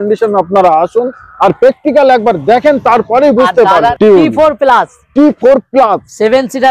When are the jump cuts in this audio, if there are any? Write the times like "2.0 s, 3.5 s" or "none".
3.9 s